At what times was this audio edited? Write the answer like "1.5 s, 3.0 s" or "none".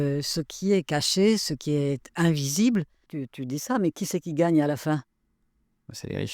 3.0 s